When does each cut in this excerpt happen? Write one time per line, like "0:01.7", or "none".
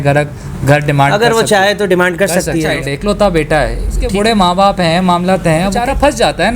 0:02.7
0:04.0
0:05.8